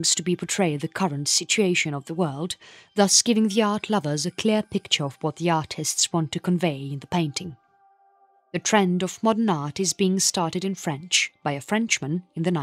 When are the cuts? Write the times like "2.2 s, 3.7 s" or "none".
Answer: 2.8 s